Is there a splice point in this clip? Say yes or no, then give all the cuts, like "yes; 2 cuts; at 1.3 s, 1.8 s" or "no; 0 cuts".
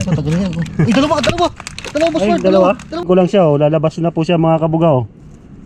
yes; 1 cut; at 3.1 s